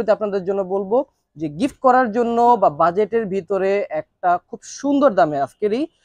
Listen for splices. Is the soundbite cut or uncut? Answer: uncut